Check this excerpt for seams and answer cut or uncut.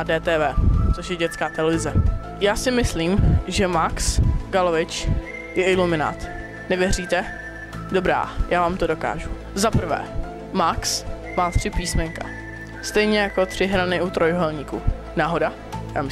cut